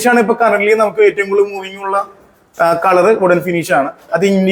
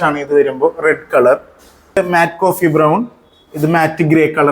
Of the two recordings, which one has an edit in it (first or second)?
second